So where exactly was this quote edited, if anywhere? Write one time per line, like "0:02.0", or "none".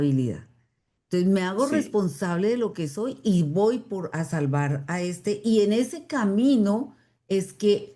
none